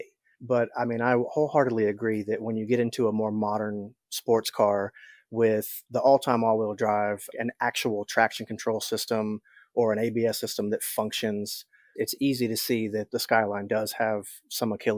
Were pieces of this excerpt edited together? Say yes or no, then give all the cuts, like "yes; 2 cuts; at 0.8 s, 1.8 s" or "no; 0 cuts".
yes; 2 cuts; at 5.8 s, 7.3 s